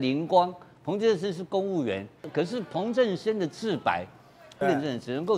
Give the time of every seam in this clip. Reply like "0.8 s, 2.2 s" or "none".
2.2 s, 4.5 s

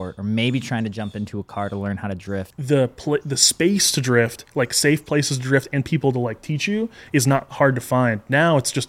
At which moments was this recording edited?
2.5 s

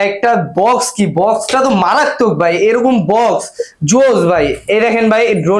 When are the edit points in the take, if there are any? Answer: none

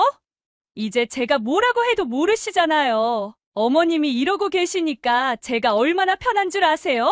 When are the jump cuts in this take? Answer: 3.4 s

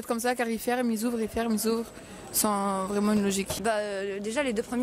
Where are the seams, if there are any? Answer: 3.8 s

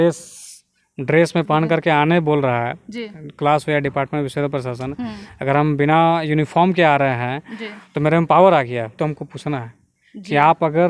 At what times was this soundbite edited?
9.0 s

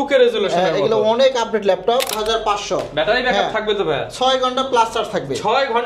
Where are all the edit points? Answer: 2.2 s

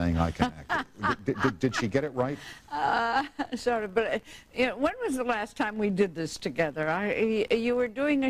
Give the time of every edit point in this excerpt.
none

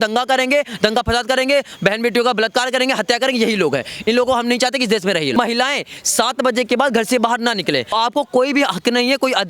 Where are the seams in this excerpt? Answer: 5.4 s, 7.9 s

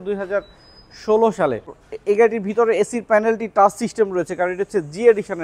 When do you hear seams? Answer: 1.8 s

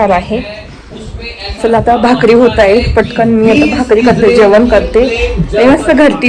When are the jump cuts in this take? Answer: none

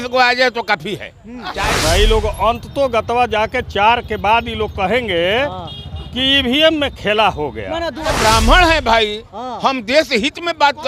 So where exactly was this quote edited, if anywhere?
1.7 s, 8.1 s

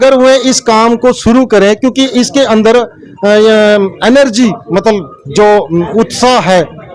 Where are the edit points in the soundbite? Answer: none

